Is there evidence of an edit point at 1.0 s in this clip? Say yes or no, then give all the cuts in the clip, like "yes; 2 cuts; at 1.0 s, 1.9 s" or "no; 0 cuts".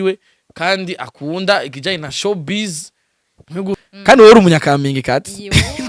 no; 1 cut; at 3.8 s